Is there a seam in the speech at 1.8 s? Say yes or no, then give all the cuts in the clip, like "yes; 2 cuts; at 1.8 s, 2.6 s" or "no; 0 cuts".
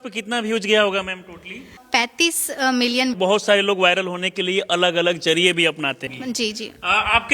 yes; 3 cuts; at 1.8 s, 3.2 s, 6.1 s